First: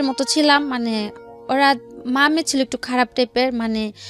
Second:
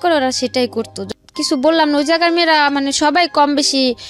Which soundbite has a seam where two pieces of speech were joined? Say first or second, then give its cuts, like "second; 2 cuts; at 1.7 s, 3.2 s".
second; 1 cut; at 1.0 s